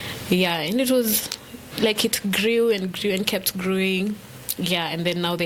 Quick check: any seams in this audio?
no; 0 cuts

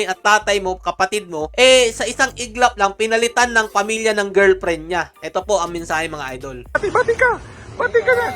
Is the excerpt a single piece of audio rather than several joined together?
yes; 0 cuts

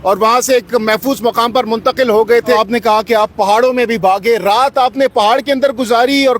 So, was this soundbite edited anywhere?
yes; 1 cut; at 2.6 s

